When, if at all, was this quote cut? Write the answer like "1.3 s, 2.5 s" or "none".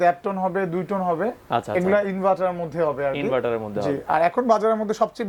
none